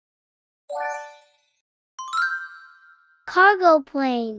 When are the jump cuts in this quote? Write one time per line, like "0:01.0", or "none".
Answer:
none